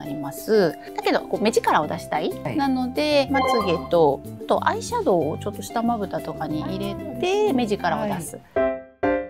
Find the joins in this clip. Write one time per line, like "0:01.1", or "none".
0:00.9
0:03.3
0:08.3